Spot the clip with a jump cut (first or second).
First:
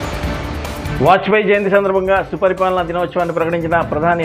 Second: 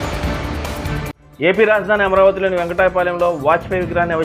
first